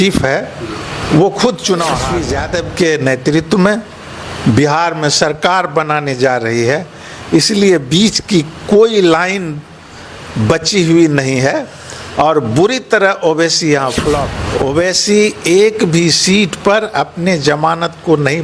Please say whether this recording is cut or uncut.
cut